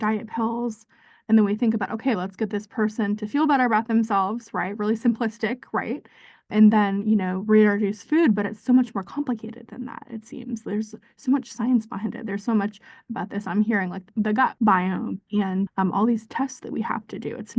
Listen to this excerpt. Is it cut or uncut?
uncut